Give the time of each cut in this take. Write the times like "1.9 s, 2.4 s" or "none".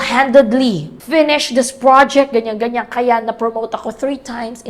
0.9 s